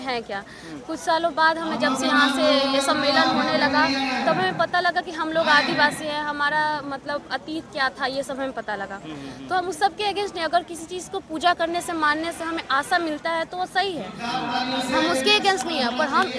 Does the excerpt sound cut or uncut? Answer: uncut